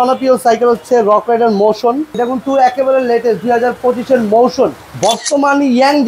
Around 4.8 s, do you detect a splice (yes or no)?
yes